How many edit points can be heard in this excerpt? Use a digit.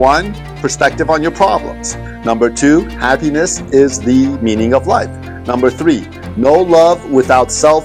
0